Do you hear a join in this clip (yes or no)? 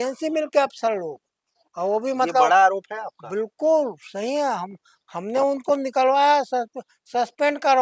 no